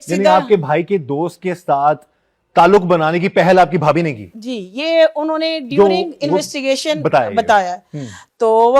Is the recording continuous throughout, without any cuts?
yes; 0 cuts

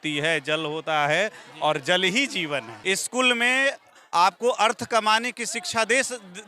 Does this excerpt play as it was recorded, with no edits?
no; 1 cut; at 2.7 s

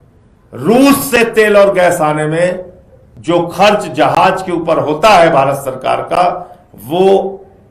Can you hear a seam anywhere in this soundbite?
no; 0 cuts

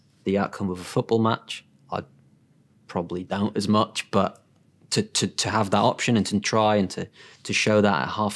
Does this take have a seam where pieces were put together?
no; 0 cuts

